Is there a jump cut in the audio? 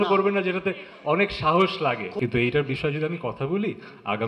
yes; 1 cut; at 2.1 s

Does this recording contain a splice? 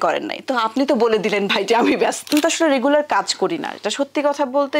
yes; 1 cut; at 2.3 s

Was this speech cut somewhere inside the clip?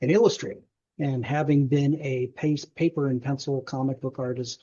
no; 0 cuts

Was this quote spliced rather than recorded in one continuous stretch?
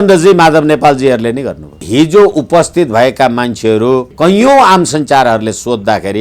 yes; 2 cuts; at 1.8 s, 4.1 s

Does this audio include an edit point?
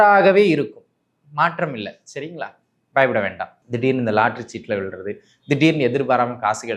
yes; 1 cut; at 3.5 s

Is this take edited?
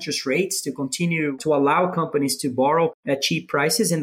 yes; 2 cuts; at 1.3 s, 3.0 s

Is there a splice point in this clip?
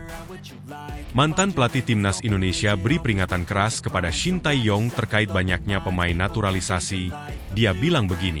no; 0 cuts

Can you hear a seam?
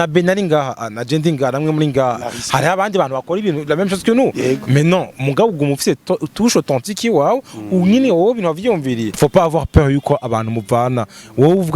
yes; 1 cut; at 9.1 s

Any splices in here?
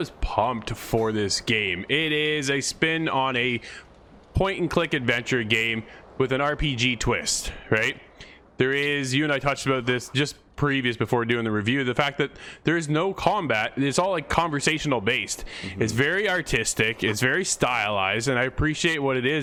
no; 0 cuts

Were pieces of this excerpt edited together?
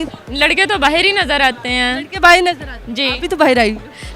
no; 0 cuts

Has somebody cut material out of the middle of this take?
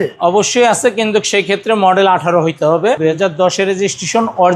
yes; 1 cut; at 3.0 s

